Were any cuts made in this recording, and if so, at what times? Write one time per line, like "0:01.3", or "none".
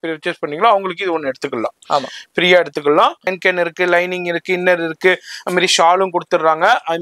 0:03.4